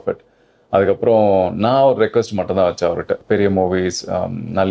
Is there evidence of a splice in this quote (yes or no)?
yes